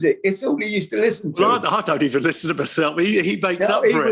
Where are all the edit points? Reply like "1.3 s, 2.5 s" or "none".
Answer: 1.3 s